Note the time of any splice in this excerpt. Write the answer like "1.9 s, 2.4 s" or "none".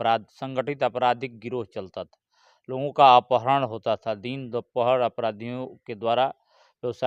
none